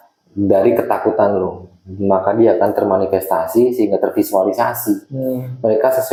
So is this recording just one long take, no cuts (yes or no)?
yes